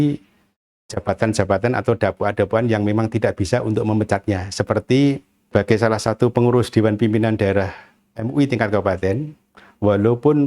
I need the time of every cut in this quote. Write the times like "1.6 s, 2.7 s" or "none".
5.3 s